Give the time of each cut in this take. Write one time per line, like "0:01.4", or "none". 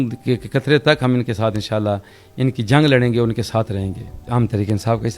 0:04.2